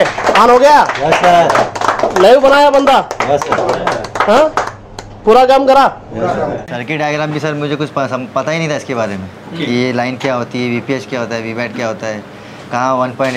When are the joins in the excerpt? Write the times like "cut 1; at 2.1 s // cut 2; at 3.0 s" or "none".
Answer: cut 1; at 6.8 s